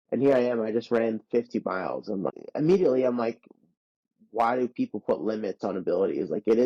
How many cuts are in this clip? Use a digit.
1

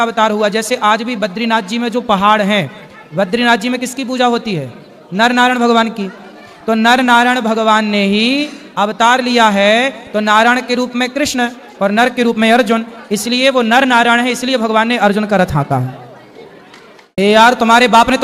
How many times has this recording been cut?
1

